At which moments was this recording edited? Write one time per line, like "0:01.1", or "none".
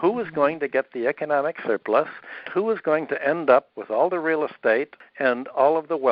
0:02.5
0:03.8